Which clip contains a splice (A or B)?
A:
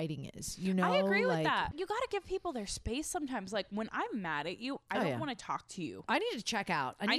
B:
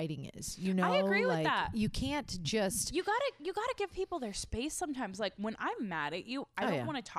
A